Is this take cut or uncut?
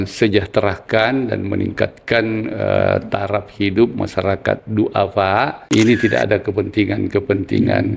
cut